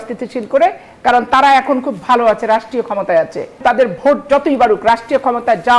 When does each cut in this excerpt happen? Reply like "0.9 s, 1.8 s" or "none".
3.6 s